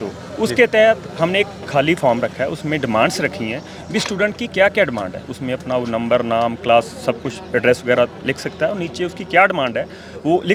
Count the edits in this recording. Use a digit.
0